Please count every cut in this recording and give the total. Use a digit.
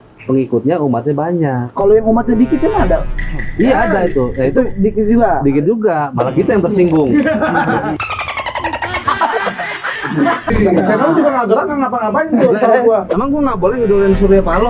1